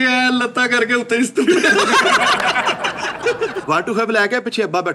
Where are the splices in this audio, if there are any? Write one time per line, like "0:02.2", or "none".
0:03.6